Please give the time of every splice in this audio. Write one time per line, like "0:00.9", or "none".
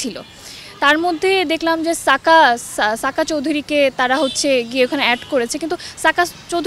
none